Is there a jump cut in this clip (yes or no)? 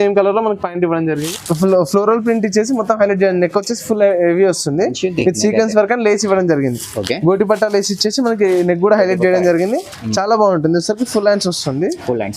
yes